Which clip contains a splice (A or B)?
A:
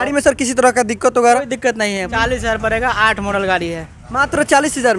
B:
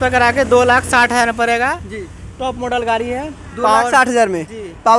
A